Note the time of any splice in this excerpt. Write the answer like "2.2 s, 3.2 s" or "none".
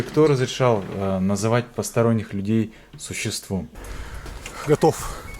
3.8 s

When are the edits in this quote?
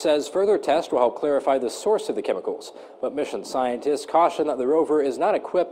1.2 s

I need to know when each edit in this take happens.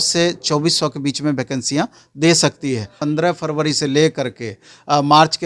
2.9 s

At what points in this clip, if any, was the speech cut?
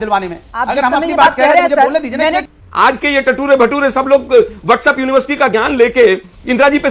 2.6 s

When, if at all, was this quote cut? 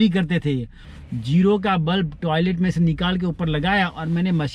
0.9 s

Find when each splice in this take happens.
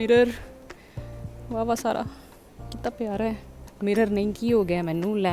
none

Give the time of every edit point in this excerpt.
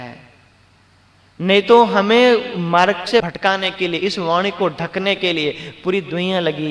3.3 s

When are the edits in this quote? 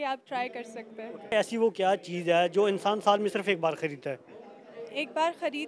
1.3 s

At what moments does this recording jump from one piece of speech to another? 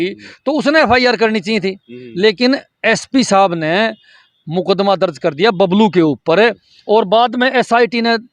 none

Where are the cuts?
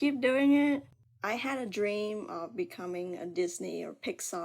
0.9 s

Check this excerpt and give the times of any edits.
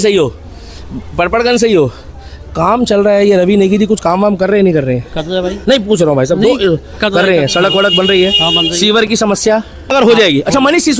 9.9 s

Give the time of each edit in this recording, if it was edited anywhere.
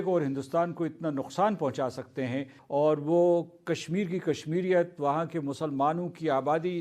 2.6 s

